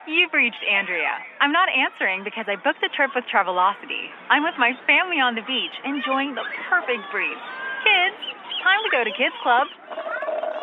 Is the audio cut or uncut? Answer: uncut